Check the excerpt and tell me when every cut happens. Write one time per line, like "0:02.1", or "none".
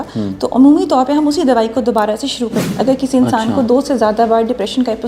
0:02.7